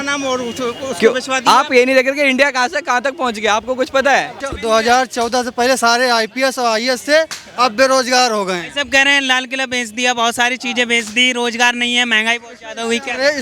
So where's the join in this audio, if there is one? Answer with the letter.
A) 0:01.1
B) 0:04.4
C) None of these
B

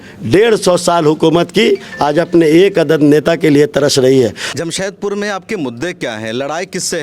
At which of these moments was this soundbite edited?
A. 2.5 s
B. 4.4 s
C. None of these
B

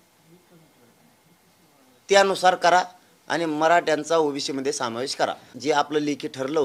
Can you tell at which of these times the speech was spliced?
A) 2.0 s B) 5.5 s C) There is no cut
B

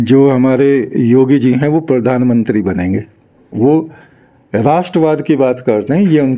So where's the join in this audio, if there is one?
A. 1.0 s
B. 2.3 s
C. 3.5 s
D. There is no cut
C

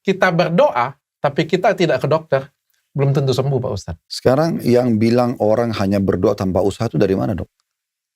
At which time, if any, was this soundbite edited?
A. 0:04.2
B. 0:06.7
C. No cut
A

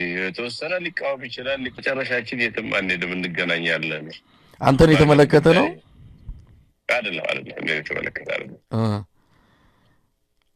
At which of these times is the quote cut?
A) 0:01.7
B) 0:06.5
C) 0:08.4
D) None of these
A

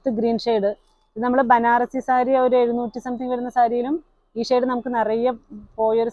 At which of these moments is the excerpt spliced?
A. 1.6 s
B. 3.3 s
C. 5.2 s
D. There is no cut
D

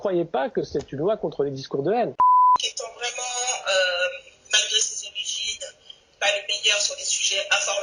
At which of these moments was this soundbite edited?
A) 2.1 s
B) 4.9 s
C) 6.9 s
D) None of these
A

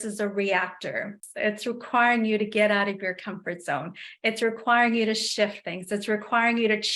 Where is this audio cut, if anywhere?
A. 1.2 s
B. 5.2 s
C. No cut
A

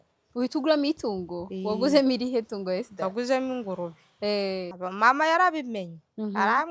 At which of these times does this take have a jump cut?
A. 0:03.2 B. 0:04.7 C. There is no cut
B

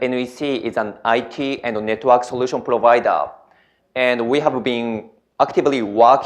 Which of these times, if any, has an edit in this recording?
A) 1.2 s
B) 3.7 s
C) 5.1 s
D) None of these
A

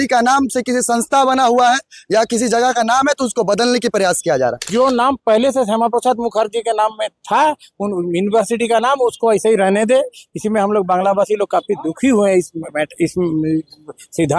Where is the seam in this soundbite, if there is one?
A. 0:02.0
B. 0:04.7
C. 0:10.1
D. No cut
B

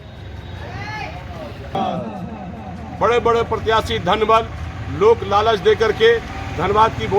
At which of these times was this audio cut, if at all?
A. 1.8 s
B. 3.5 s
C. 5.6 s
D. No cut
A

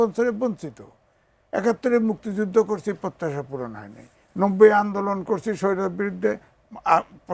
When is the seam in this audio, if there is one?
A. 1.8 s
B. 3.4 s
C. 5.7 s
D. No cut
D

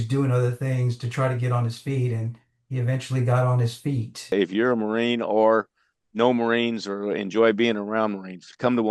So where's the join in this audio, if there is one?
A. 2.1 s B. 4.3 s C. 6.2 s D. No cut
B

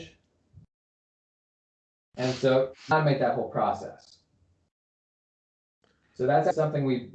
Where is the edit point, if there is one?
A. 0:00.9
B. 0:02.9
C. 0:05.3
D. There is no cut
D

